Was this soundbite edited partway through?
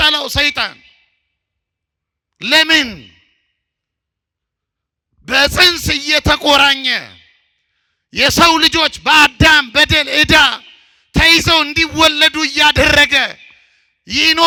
no; 0 cuts

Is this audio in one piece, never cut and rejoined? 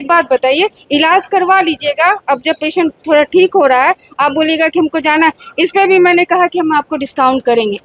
yes; 0 cuts

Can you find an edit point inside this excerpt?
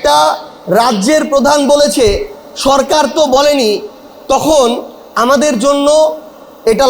no; 0 cuts

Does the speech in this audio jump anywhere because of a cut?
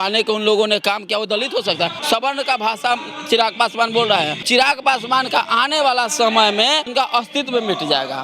yes; 3 cuts; at 2.0 s, 4.4 s, 6.9 s

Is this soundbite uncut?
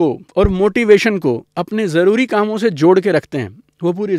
yes; 0 cuts

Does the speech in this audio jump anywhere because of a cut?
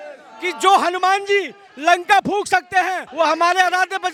no; 0 cuts

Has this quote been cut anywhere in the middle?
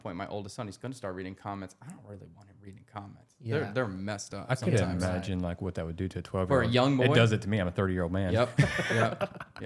no; 0 cuts

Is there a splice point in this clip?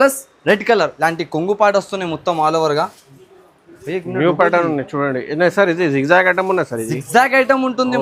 yes; 1 cut; at 0.9 s

